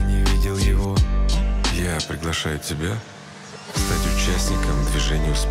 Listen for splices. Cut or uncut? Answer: uncut